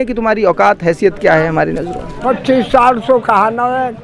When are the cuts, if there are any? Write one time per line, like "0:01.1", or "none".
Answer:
0:02.2